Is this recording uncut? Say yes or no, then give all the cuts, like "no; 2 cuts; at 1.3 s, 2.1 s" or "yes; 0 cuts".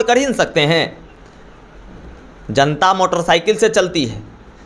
yes; 0 cuts